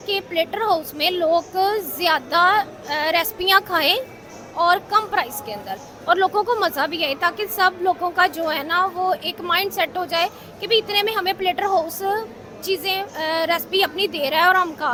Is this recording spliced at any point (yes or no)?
no